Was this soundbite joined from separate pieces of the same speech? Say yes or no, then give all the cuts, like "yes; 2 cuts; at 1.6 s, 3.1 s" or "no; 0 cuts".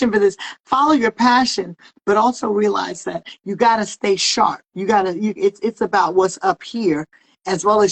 no; 0 cuts